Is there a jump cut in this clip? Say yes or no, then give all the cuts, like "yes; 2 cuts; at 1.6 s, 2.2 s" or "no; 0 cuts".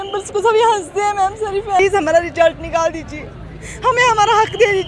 yes; 1 cut; at 1.8 s